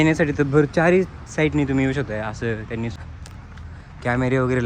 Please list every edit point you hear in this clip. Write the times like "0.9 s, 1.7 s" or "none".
2.9 s